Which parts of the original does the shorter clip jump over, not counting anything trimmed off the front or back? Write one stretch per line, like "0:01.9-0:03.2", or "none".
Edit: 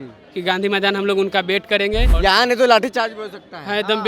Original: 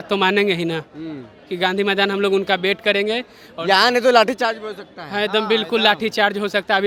0:03.2-0:03.5